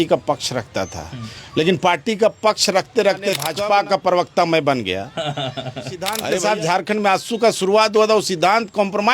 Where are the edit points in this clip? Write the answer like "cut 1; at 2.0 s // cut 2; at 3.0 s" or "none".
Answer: cut 1; at 3.6 s // cut 2; at 6.1 s